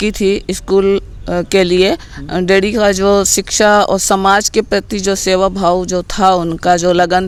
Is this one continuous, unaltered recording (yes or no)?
yes